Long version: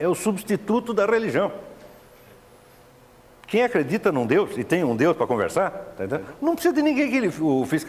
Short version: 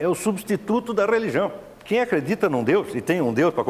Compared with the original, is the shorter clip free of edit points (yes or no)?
no